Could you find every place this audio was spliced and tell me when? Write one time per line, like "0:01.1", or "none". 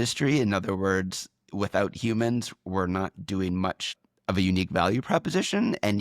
0:03.9